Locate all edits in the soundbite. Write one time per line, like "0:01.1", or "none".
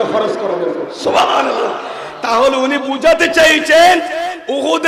none